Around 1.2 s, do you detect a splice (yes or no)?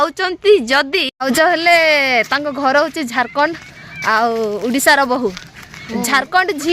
yes